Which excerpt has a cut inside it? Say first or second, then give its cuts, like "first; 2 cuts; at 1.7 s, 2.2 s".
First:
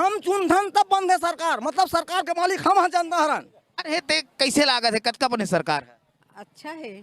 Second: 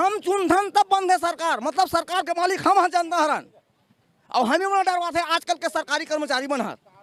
first; 1 cut; at 3.9 s